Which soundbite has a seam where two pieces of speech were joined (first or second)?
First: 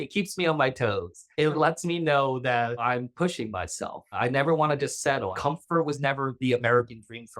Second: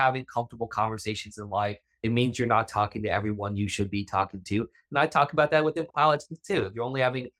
first